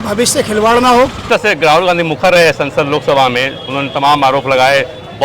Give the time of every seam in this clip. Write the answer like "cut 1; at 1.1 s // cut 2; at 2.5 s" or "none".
cut 1; at 1.3 s